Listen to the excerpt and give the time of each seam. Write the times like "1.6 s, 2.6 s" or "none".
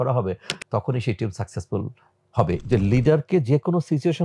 2.6 s